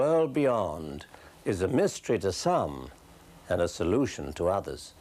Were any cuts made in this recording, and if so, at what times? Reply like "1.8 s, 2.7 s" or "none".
none